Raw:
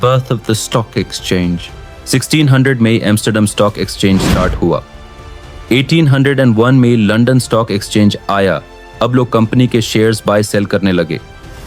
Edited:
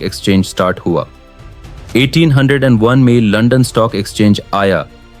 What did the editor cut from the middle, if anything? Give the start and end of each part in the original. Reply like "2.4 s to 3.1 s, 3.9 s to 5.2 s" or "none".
none